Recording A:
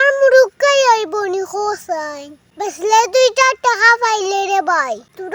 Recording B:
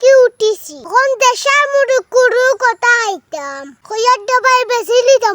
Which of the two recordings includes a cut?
B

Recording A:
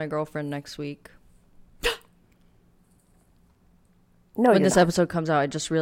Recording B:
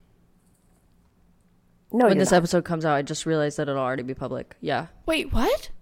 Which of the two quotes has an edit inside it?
B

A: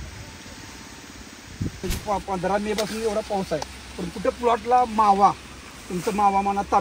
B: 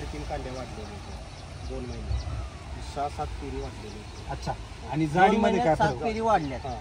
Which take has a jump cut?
A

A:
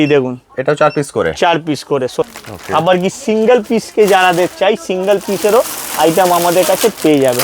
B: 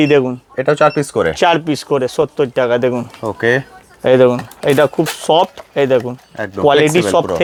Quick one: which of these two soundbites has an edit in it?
A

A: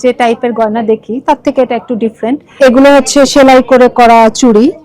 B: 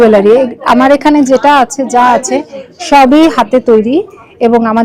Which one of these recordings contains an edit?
A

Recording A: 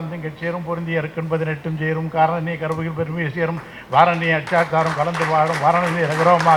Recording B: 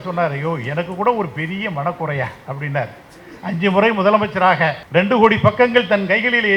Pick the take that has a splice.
B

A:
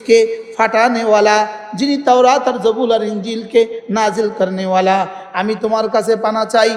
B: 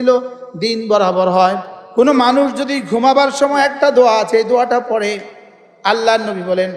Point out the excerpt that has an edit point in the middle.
B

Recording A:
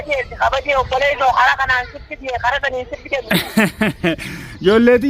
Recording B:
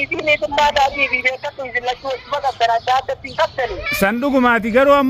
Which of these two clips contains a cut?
A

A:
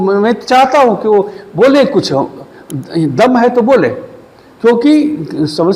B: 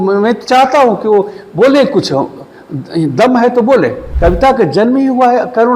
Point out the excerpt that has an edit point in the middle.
B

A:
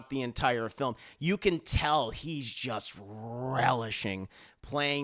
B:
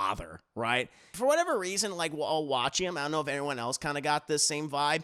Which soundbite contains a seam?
B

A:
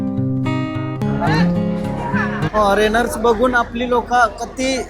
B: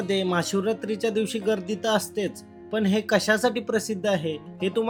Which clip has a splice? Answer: A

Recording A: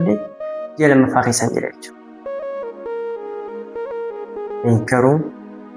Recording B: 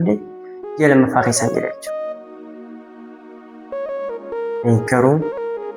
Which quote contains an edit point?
A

